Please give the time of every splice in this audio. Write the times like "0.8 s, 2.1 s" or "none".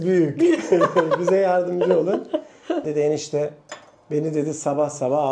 2.9 s